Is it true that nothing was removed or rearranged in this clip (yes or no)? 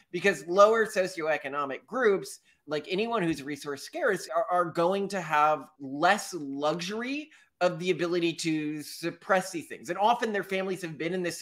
no